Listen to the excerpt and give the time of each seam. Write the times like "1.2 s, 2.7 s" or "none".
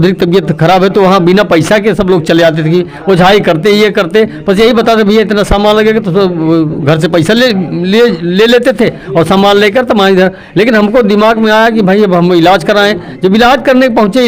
none